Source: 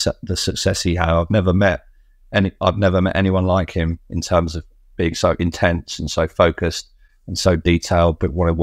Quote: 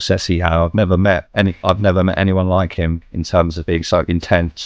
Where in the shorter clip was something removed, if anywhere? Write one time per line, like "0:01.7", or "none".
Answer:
0:01.3
0:03.6